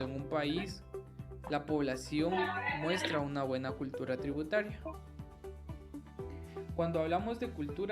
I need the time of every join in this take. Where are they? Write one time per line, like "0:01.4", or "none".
0:06.0

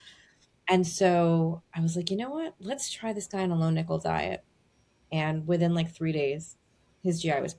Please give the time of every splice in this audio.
none

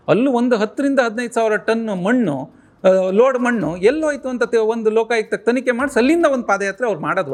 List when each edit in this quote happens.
none

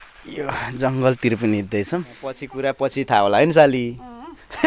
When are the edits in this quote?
0:02.5

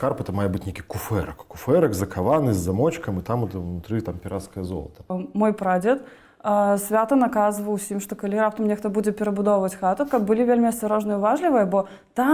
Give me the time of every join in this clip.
0:05.2

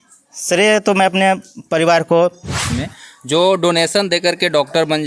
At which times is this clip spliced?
0:02.8

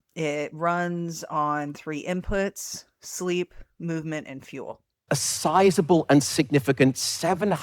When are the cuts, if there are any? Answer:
0:04.9

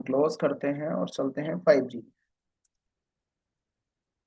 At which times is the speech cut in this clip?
none

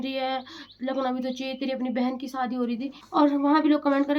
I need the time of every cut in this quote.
0:03.0

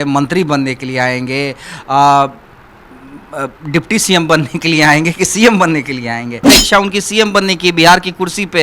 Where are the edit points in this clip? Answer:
0:06.6

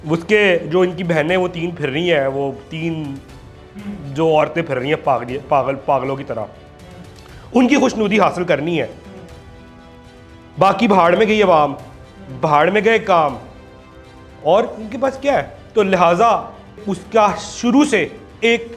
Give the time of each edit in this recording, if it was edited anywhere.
none

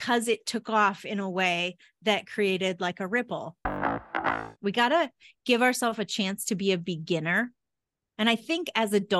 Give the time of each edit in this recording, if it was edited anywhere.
0:04.0

